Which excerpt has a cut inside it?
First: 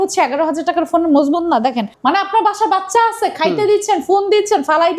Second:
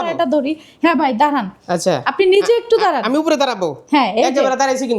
first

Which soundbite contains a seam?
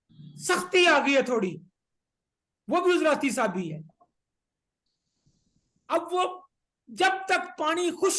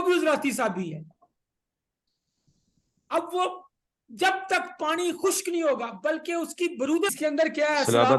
second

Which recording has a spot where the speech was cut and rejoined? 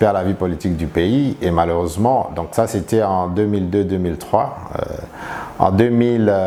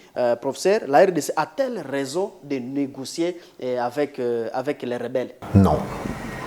second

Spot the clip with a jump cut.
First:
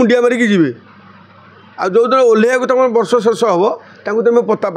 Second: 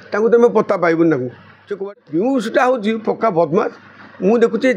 second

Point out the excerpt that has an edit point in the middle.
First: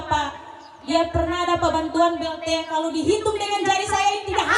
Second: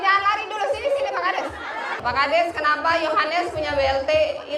second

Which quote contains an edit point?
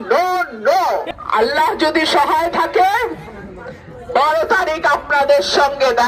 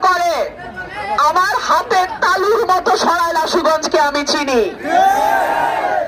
first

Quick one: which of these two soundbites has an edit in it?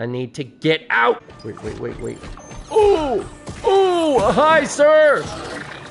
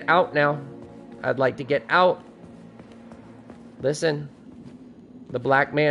first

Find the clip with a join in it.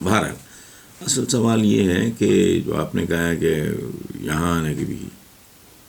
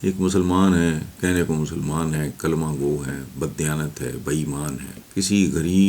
second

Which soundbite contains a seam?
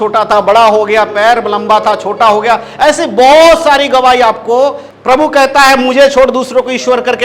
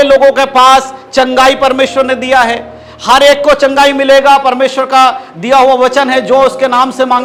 first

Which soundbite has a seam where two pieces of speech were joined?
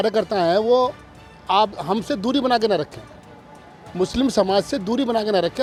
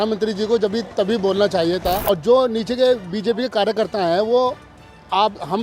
second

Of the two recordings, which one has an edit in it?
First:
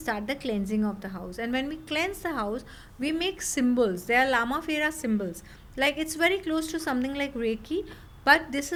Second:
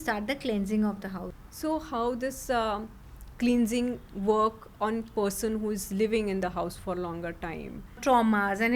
second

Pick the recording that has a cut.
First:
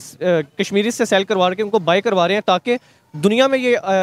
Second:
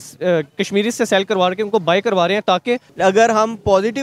second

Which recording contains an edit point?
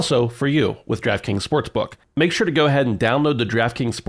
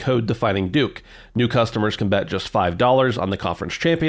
first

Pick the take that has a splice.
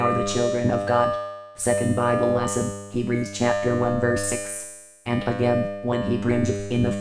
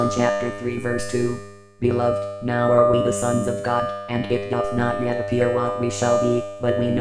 first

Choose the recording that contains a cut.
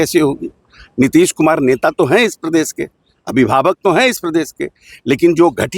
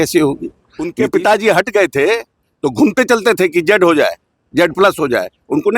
second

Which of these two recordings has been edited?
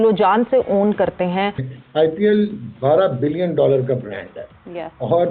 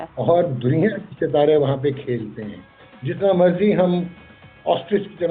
first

